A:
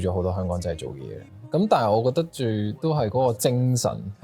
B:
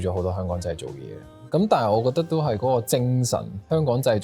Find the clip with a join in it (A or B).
B